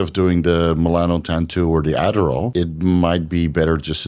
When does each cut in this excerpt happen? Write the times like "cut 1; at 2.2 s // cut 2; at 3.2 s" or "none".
cut 1; at 2.5 s